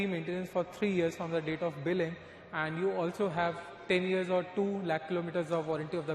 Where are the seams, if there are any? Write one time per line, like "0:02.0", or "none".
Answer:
none